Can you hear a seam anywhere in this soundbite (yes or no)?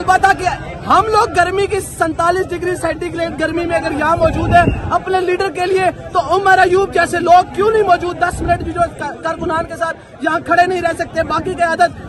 no